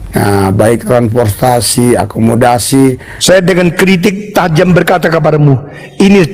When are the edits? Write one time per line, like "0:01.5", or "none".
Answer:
0:03.1